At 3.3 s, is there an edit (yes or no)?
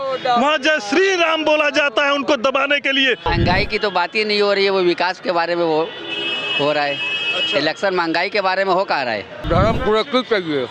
yes